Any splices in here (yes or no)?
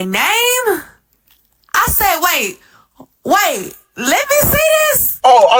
no